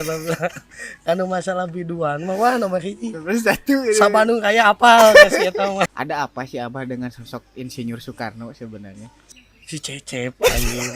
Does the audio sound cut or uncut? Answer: cut